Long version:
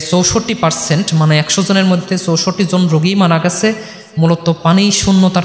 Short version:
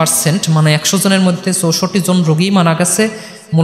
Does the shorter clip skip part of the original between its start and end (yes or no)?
no